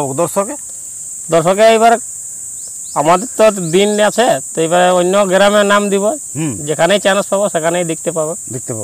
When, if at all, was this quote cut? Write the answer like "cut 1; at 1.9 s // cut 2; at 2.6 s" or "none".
none